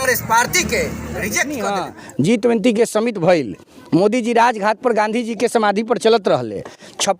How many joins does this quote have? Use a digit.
1